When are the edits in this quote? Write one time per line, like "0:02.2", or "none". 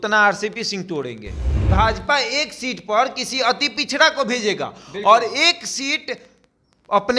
0:01.6